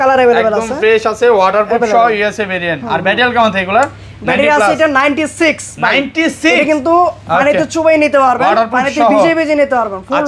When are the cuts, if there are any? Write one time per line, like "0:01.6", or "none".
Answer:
none